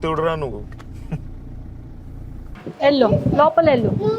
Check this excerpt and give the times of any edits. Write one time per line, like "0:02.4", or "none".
0:02.4